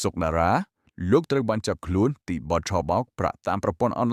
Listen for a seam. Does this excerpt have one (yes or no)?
no